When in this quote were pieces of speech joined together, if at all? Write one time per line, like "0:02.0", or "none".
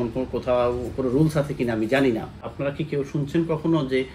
0:02.4